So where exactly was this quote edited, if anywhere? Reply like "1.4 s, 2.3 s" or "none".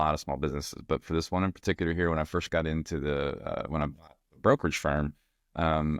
none